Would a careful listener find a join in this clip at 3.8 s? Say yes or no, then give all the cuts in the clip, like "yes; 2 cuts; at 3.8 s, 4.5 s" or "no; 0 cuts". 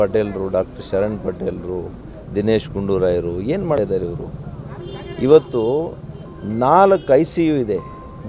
yes; 1 cut; at 3.8 s